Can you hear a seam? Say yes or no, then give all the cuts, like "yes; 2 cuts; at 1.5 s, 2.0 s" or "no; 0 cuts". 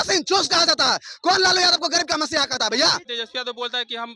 yes; 1 cut; at 3.1 s